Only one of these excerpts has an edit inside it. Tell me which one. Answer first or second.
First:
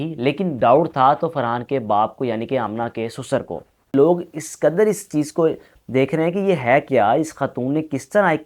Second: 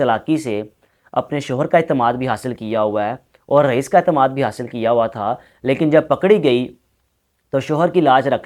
first